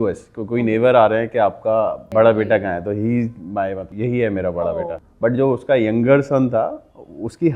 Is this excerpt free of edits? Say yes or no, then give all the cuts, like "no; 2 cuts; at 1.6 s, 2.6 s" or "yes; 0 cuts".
no; 3 cuts; at 2.0 s, 3.9 s, 5.0 s